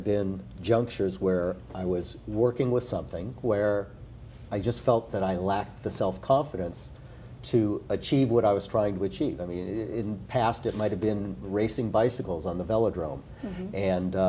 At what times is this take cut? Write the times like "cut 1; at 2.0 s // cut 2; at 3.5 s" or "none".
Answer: none